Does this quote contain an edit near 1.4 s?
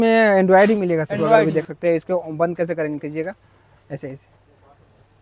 yes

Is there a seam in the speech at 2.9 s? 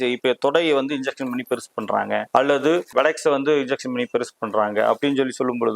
yes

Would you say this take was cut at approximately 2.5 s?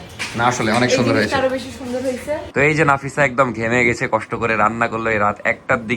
yes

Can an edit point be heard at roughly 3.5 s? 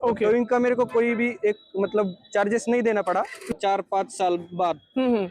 yes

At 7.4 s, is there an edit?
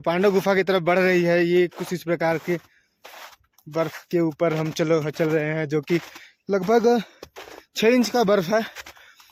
no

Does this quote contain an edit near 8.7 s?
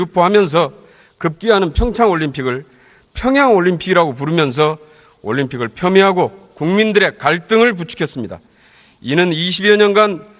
no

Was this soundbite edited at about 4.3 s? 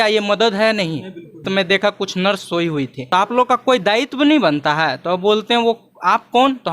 no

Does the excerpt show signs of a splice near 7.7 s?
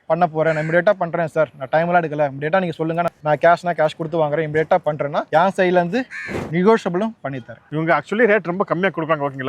yes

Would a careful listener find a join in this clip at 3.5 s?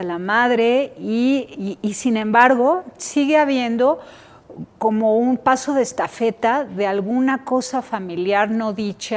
yes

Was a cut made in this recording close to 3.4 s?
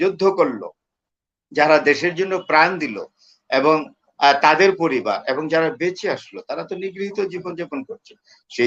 no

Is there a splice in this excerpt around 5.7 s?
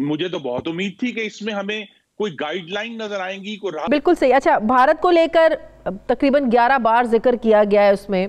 no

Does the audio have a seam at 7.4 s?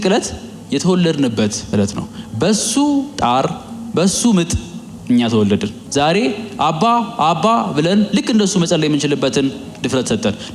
no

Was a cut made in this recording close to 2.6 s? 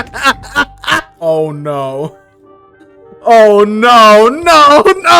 no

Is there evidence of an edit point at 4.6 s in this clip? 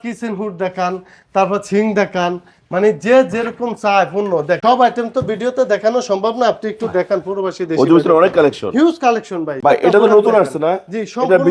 yes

